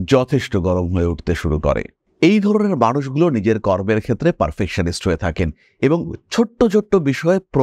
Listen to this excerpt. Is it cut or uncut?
uncut